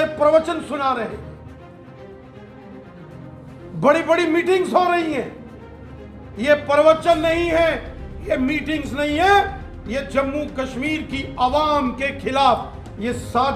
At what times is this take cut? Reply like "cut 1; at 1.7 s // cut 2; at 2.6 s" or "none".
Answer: none